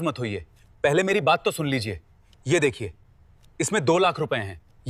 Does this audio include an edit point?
no; 0 cuts

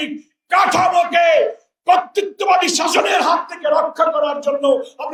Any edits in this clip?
no; 0 cuts

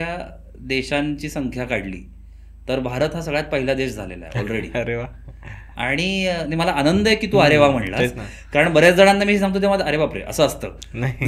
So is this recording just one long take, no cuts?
yes; 0 cuts

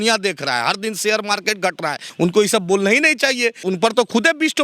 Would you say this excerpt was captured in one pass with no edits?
no; 2 cuts; at 2.1 s, 3.6 s

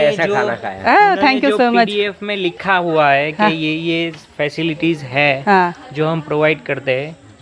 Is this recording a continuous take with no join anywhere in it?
yes; 0 cuts

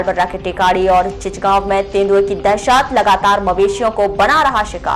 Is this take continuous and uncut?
yes; 0 cuts

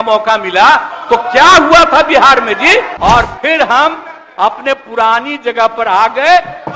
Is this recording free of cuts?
no; 1 cut; at 2.9 s

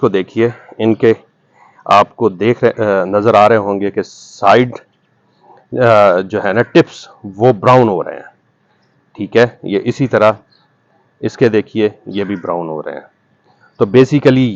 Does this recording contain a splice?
no; 0 cuts

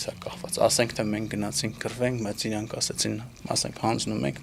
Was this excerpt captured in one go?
yes; 0 cuts

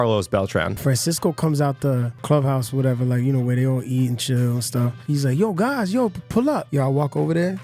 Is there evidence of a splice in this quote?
yes; 4 cuts; at 0.8 s, 2.2 s, 5.0 s, 6.7 s

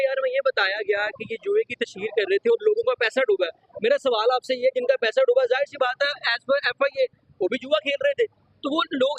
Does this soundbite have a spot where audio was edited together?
no; 0 cuts

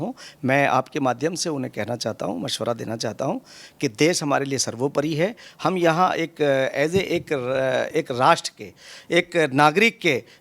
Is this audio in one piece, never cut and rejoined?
yes; 0 cuts

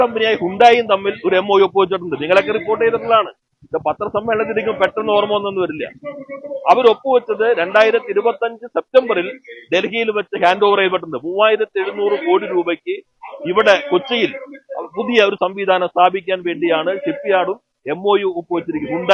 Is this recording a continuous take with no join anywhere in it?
yes; 0 cuts

